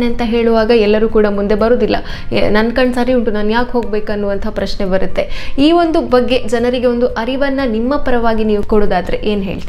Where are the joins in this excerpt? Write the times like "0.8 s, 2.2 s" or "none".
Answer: 8.6 s